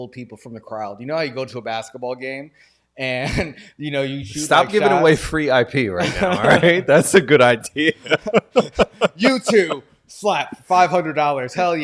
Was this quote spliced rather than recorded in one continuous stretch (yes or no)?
no